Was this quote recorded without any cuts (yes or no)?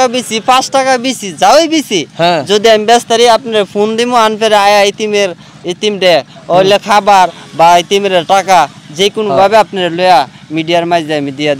yes